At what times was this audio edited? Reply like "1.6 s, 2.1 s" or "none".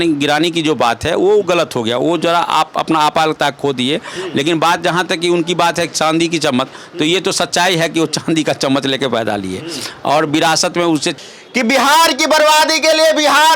11.2 s